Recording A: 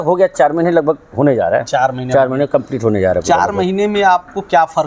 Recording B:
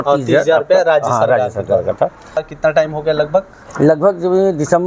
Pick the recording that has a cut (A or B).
B